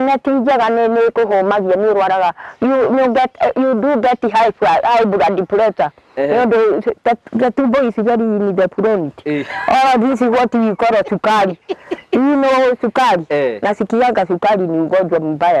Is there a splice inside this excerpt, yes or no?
no